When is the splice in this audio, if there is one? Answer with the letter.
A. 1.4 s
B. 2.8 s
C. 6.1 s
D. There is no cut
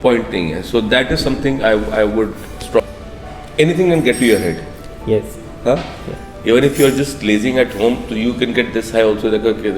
B